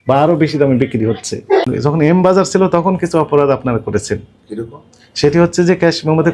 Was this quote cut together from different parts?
yes; 1 cut; at 1.6 s

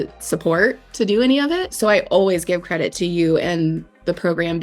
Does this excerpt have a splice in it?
yes; 2 cuts; at 1.7 s, 2.9 s

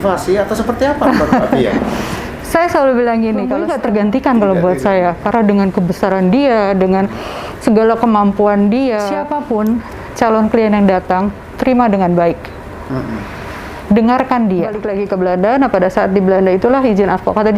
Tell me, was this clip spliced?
yes; 3 cuts; at 3.6 s, 9.3 s, 14.9 s

